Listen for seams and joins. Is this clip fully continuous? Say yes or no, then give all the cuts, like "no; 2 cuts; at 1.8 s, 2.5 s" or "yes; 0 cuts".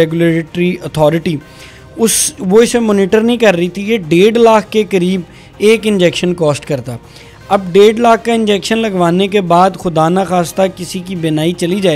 yes; 0 cuts